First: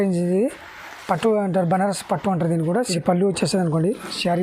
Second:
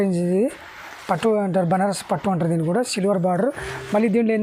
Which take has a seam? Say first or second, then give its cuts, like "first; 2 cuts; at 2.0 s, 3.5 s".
first; 1 cut; at 2.9 s